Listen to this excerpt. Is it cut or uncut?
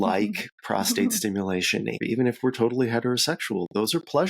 cut